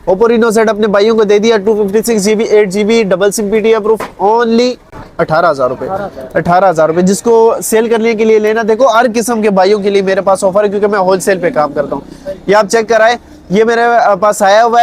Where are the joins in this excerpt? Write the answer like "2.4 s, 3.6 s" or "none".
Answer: none